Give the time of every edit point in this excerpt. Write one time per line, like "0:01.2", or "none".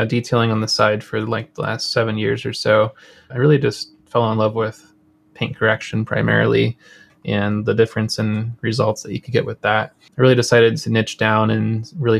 0:03.3
0:10.0